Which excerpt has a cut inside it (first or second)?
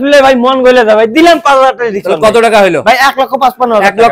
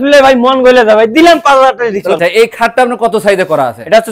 second